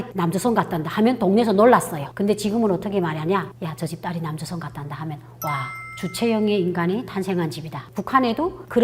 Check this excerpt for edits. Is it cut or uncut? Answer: cut